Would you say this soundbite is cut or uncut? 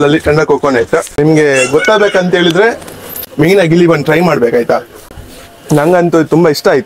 cut